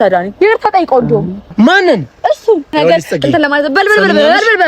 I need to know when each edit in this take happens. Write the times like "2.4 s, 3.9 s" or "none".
2.8 s